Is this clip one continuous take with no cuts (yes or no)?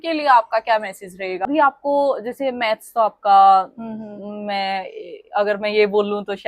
no